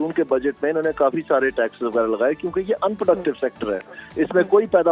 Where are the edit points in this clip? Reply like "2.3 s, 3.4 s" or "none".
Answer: none